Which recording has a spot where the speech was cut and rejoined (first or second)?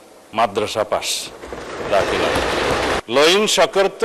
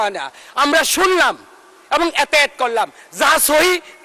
first